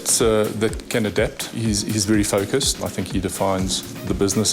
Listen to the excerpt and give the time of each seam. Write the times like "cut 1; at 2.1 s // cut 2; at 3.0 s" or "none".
cut 1; at 1.5 s // cut 2; at 2.9 s